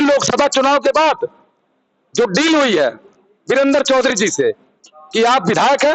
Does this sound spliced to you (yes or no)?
no